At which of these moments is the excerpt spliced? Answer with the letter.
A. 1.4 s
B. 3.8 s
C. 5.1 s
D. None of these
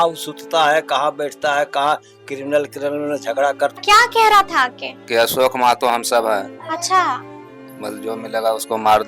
B